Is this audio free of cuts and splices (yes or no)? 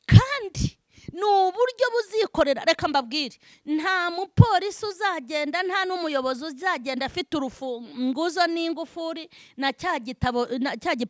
yes